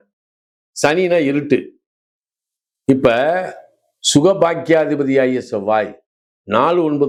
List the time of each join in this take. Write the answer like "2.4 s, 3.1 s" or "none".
none